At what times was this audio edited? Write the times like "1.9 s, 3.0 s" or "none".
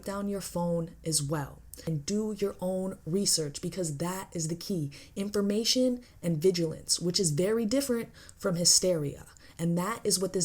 1.9 s